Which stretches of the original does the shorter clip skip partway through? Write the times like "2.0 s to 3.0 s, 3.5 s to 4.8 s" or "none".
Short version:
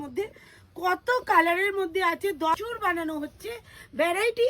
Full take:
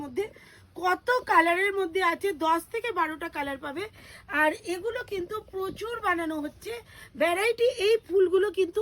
2.5 s to 5.8 s